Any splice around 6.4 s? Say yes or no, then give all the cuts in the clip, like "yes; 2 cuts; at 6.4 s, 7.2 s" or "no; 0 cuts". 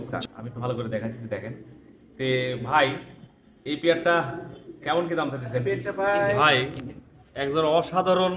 yes; 1 cut; at 6.4 s